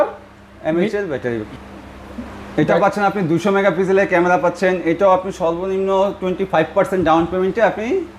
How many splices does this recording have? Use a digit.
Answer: 1